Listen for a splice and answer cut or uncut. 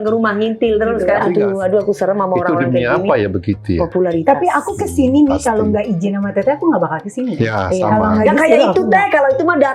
cut